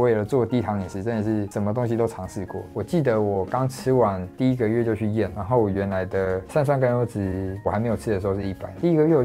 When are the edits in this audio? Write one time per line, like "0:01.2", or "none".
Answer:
0:02.7
0:04.3